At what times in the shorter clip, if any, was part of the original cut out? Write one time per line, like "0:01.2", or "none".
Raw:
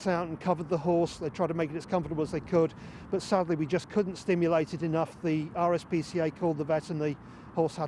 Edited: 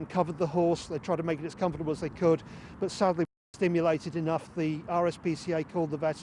0:03.4

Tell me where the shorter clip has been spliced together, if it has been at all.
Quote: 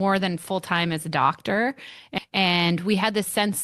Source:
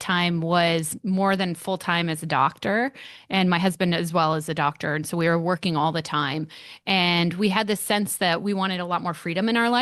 0:02.0

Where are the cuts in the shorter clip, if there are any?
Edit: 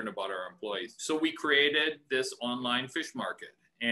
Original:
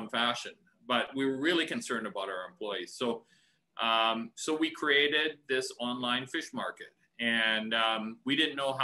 0:00.9

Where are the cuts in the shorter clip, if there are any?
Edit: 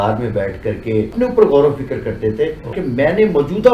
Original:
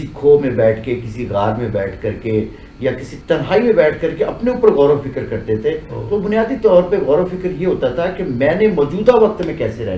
0:01.1
0:02.7

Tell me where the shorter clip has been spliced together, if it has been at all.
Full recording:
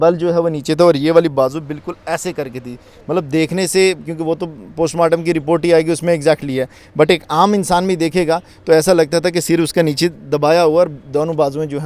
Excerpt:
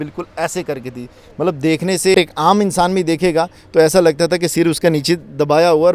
0:02.1

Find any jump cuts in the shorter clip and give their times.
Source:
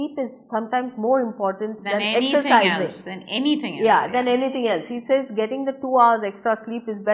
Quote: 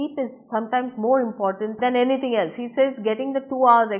0:01.8

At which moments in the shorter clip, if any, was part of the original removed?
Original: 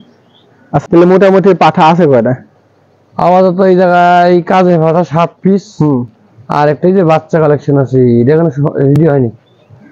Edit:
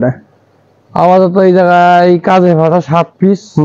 none

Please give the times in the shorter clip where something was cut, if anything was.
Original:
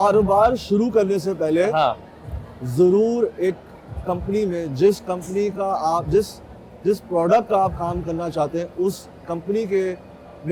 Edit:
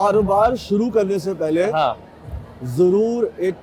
none

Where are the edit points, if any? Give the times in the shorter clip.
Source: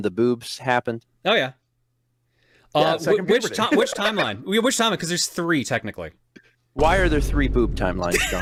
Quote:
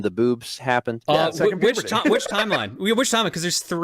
0:01.0

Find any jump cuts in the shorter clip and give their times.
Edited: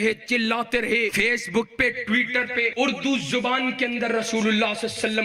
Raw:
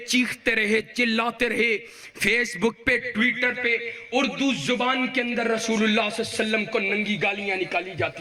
0:01.1
0:02.7

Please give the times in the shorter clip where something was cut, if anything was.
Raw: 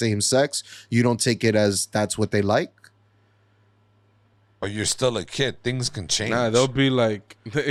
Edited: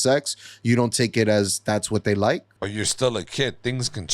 0:02.5

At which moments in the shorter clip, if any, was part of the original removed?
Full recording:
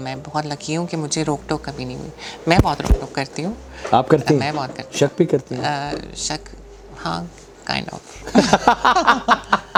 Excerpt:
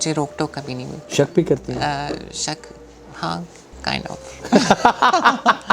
0:01.0

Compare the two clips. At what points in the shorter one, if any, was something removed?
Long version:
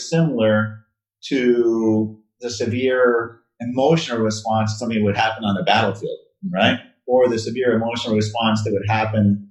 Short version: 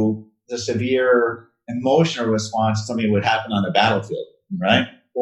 none

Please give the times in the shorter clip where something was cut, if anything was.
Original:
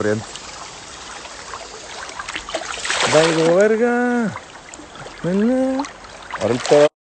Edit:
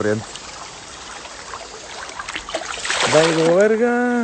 none

